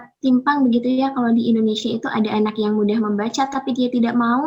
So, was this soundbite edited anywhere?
no; 0 cuts

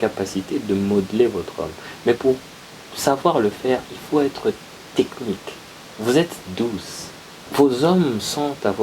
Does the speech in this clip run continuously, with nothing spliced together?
no; 1 cut; at 7.5 s

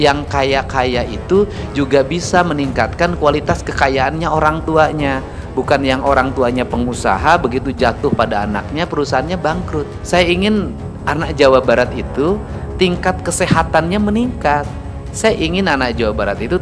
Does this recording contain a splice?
yes; 1 cut; at 10.0 s

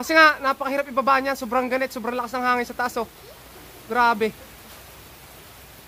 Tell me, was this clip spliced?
no; 0 cuts

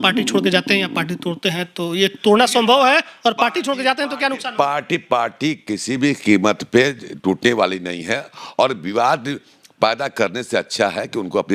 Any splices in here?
no; 0 cuts

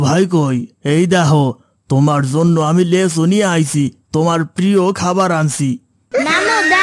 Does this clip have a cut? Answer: no; 0 cuts

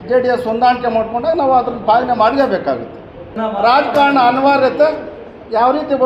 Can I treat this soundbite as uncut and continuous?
no; 1 cut; at 3.4 s

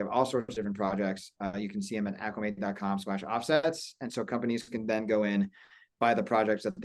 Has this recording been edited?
no; 0 cuts

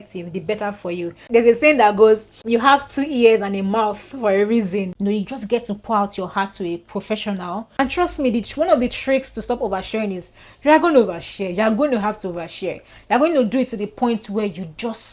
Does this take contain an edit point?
yes; 3 cuts; at 1.2 s, 4.9 s, 7.7 s

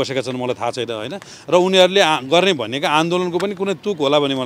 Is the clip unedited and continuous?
yes; 0 cuts

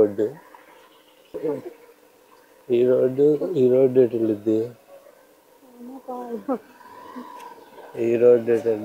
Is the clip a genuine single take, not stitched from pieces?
no; 1 cut; at 1.3 s

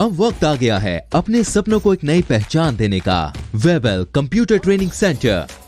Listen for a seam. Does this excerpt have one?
yes; 1 cut; at 3.4 s

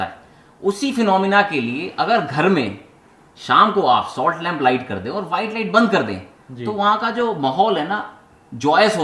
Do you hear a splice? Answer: no; 0 cuts

